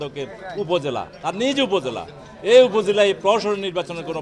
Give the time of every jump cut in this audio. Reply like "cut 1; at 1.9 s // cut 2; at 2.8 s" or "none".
none